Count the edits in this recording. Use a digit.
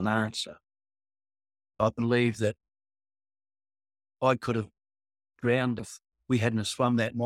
2